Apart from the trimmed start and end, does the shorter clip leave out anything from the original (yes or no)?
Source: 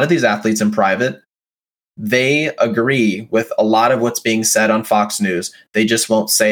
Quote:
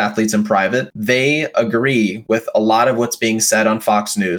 yes